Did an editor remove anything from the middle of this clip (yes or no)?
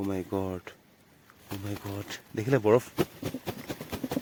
no